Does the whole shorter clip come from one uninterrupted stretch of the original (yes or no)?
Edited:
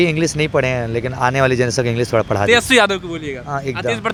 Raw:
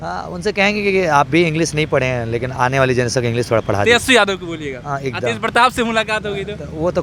yes